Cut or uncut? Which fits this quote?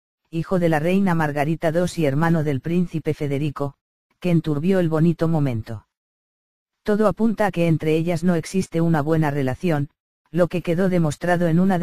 uncut